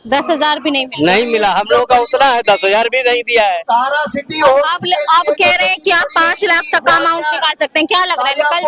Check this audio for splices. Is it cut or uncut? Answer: uncut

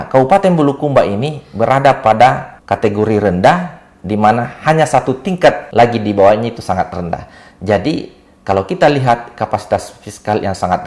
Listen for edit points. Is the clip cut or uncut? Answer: cut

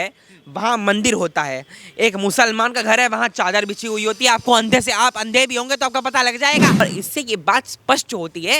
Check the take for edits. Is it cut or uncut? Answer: cut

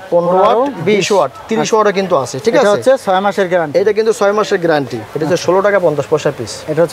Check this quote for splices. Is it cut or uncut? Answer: cut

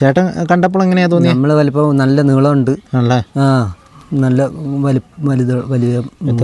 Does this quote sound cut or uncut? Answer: uncut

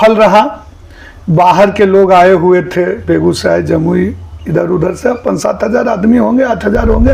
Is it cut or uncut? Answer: uncut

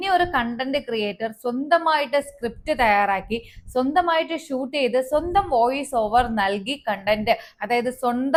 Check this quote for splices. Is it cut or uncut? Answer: uncut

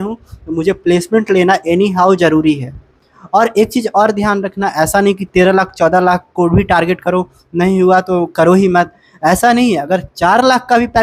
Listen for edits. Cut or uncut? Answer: uncut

